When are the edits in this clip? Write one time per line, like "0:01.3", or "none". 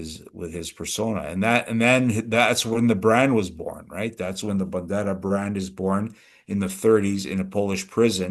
none